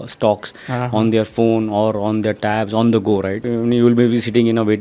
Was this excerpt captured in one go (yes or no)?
yes